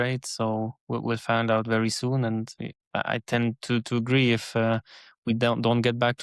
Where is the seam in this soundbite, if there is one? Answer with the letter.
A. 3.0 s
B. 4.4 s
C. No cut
C